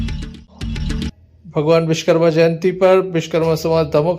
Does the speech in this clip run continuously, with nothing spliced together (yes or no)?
no